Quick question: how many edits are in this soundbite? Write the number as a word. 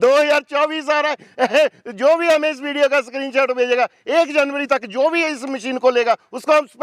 zero